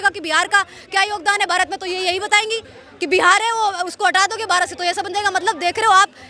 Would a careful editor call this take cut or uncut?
uncut